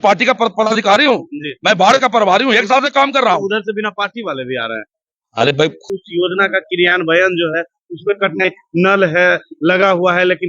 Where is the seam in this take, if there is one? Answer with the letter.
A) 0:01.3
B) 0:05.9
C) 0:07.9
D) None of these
B